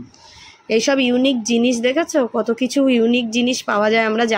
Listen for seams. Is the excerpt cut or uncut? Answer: uncut